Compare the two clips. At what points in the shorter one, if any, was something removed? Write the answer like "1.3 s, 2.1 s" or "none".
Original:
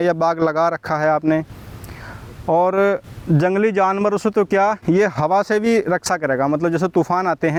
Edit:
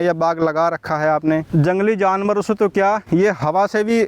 1.5 s